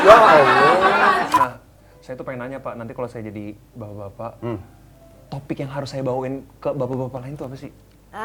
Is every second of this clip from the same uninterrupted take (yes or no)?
no